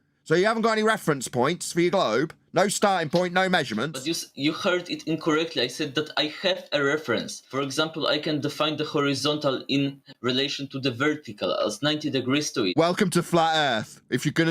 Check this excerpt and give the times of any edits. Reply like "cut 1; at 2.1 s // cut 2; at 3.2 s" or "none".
cut 1; at 4.0 s // cut 2; at 7.4 s